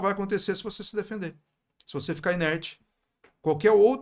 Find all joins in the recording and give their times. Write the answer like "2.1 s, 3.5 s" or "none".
none

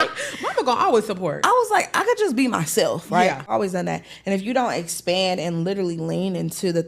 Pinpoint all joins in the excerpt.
3.5 s

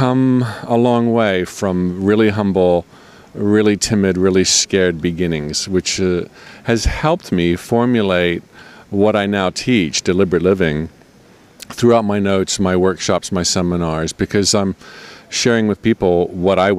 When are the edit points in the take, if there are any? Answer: 6.5 s

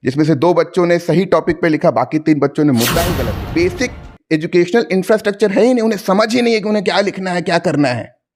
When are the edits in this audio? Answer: 3.2 s

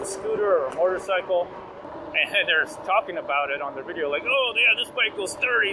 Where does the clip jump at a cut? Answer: 1.8 s

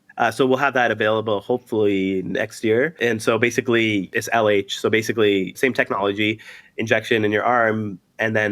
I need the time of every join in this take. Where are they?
2.9 s, 4.1 s, 5.5 s

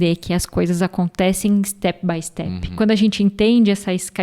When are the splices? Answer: 2.7 s

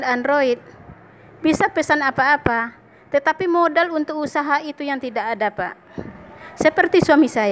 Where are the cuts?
none

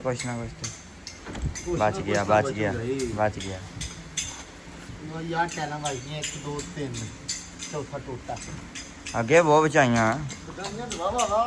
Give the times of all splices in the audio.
none

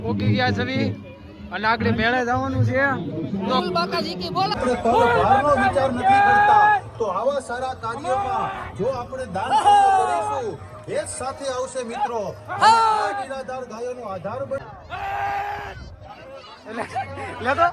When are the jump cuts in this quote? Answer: 4.5 s, 14.6 s

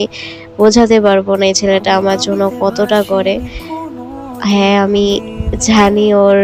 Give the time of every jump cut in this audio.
none

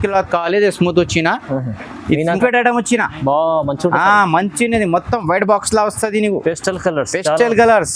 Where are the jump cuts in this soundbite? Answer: 2.4 s

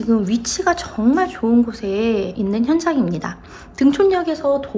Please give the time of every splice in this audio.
2.3 s

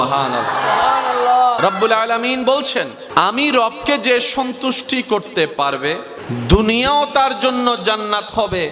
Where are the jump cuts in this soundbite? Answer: 1.6 s

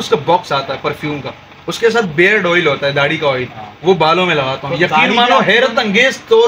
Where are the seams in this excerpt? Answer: none

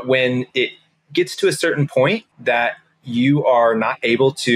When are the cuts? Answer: 2.3 s

